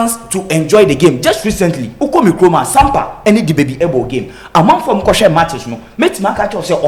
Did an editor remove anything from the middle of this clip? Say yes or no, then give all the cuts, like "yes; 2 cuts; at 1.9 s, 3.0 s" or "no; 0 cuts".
no; 0 cuts